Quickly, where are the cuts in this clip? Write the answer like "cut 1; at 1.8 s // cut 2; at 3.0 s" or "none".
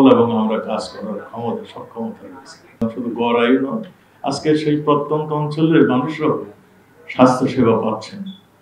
cut 1; at 2.8 s